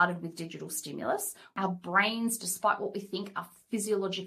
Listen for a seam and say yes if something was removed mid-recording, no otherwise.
yes